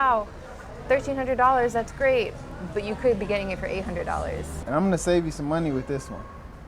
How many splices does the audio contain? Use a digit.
1